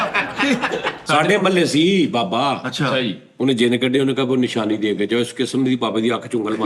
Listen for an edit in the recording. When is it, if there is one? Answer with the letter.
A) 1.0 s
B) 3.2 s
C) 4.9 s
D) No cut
A